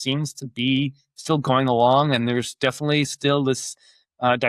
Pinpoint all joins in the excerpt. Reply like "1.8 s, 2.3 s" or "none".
none